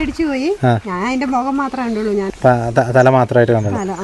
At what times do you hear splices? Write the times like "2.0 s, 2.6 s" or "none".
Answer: 2.3 s